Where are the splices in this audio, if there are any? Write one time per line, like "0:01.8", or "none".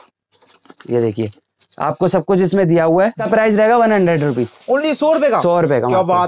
0:03.2